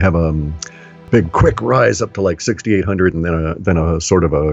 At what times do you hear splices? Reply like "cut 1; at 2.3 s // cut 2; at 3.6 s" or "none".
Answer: cut 1; at 1.0 s